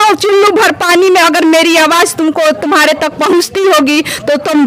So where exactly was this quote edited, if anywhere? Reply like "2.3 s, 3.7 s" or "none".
none